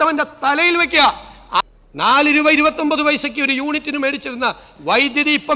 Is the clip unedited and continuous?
no; 1 cut; at 1.6 s

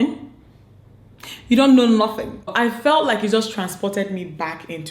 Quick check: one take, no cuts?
no; 1 cut; at 2.5 s

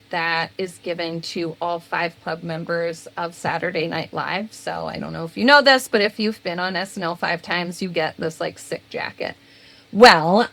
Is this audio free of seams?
yes; 0 cuts

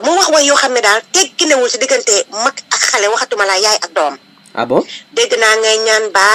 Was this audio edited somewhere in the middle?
no; 0 cuts

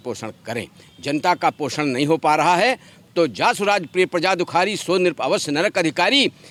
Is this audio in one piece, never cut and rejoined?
yes; 0 cuts

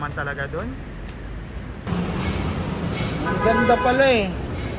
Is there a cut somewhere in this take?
yes; 1 cut; at 1.9 s

